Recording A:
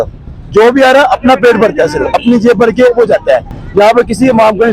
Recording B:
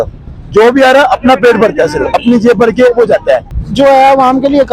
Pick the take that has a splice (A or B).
B